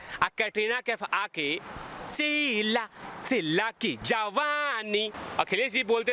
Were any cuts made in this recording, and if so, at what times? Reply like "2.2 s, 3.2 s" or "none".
5.2 s